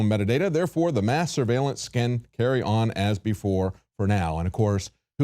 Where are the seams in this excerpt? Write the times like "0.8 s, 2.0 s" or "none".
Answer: 1.2 s